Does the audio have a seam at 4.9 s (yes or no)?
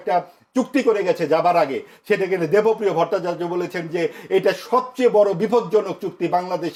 no